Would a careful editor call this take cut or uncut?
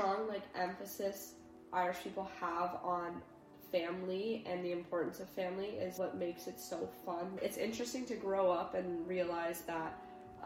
cut